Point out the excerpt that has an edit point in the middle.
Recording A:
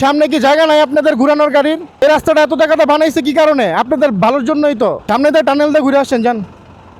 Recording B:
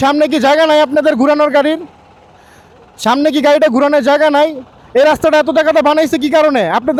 A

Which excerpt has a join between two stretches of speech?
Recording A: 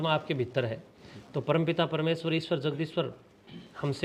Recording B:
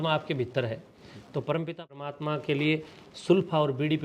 B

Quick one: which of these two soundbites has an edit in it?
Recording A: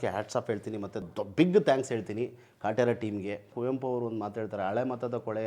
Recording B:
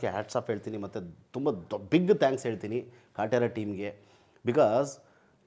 A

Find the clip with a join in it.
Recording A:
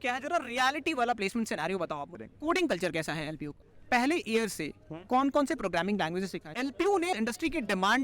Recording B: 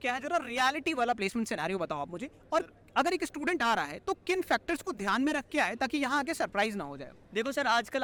A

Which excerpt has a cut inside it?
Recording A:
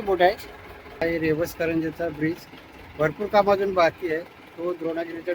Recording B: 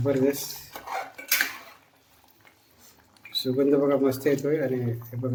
A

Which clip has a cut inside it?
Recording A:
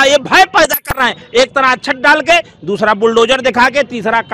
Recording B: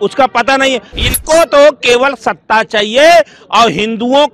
B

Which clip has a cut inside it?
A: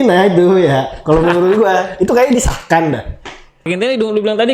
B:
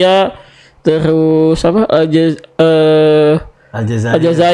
A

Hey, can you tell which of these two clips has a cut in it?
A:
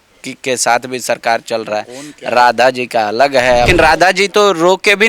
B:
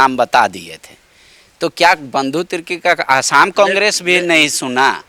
A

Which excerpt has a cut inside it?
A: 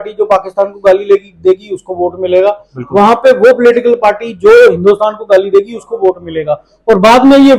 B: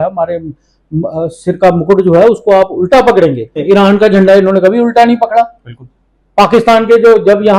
B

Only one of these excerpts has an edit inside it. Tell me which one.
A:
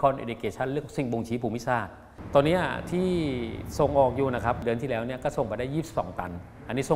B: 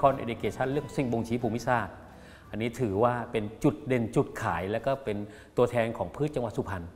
A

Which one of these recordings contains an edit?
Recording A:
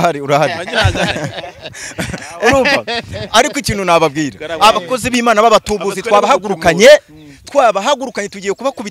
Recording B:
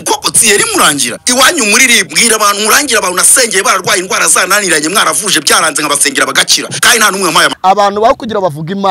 B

